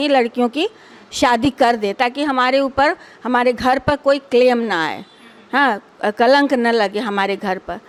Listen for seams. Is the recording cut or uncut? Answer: uncut